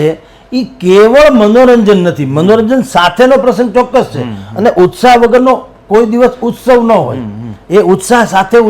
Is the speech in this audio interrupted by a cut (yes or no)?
no